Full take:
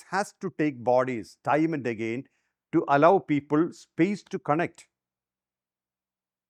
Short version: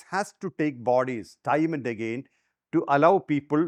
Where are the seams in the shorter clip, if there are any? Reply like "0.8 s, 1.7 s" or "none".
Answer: none